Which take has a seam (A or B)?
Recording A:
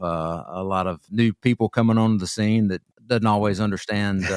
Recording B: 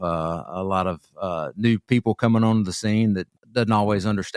A